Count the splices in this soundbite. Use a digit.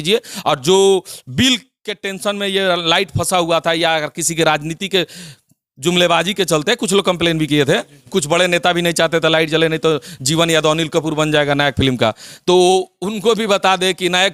0